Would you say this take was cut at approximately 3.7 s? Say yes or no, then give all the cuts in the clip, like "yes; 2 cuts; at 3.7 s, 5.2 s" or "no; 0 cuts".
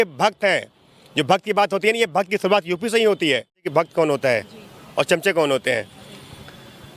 yes; 1 cut; at 3.7 s